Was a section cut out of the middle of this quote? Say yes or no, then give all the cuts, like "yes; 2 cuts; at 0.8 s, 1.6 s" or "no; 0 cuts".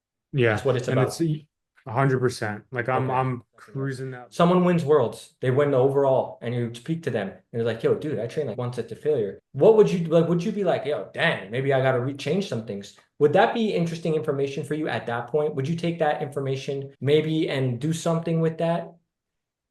yes; 2 cuts; at 4.0 s, 9.4 s